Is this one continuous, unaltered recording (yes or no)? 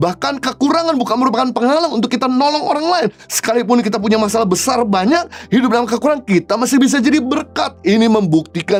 yes